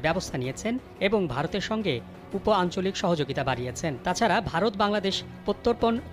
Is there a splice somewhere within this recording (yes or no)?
yes